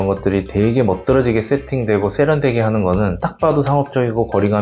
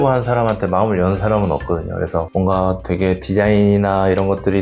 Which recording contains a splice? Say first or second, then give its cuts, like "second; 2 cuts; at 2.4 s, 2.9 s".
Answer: second; 1 cut; at 2.3 s